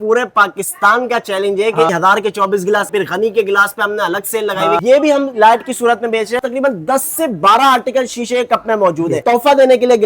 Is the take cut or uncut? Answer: cut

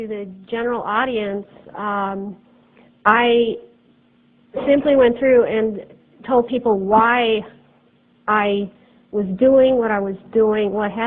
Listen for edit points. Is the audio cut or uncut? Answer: cut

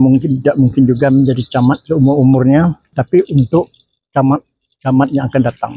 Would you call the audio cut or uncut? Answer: cut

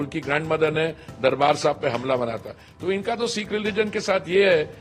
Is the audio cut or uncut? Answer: uncut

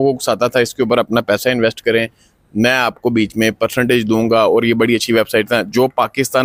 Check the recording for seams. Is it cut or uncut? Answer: uncut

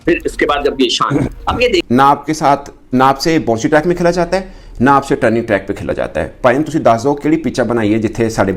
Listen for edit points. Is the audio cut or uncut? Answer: cut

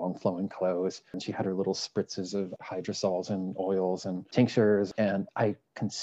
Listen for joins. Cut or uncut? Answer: cut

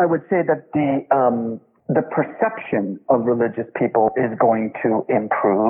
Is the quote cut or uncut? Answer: cut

